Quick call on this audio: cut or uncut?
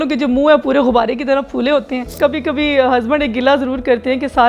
cut